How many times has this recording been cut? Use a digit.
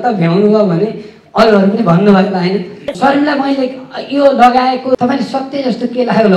2